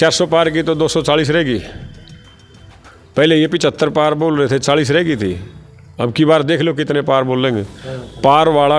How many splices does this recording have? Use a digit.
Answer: 0